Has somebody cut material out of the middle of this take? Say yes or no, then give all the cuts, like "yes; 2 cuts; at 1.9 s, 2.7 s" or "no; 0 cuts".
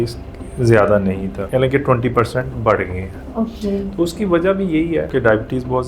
yes; 2 cuts; at 1.3 s, 5.1 s